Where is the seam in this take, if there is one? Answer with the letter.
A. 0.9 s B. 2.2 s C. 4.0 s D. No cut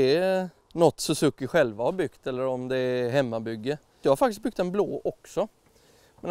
C